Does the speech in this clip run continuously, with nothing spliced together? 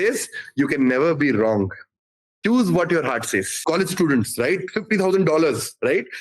no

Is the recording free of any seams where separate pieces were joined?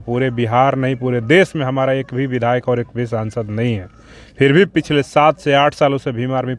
yes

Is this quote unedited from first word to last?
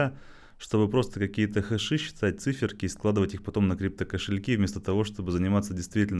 yes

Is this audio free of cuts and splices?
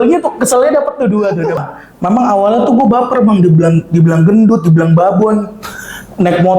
no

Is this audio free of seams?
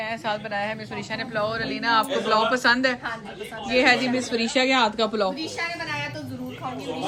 yes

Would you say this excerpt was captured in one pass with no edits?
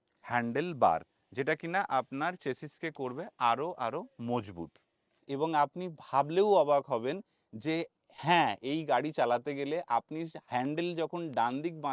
no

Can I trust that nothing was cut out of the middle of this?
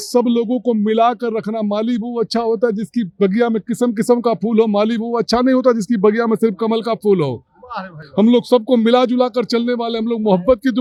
yes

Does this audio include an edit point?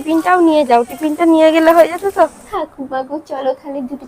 yes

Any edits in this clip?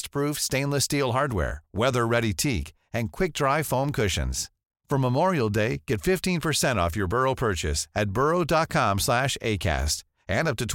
no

